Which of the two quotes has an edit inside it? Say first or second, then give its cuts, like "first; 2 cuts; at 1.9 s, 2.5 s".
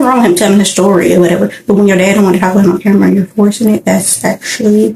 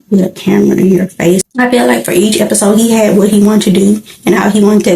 second; 1 cut; at 1.4 s